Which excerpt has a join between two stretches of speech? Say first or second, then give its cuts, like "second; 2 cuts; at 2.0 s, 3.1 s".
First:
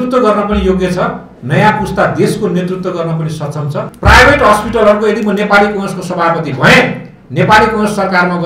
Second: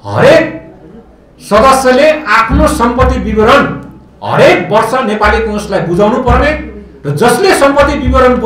first; 1 cut; at 3.9 s